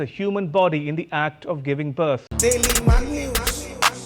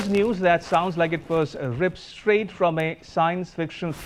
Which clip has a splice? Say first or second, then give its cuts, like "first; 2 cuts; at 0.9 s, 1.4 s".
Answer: first; 1 cut; at 2.3 s